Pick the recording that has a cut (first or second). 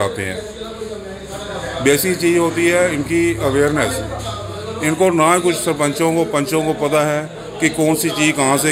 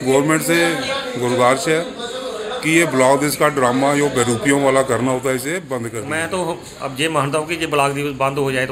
second